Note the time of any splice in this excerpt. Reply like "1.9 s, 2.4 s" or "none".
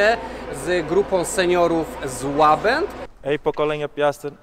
3.0 s